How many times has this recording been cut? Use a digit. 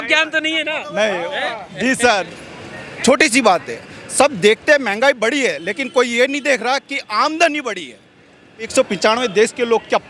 2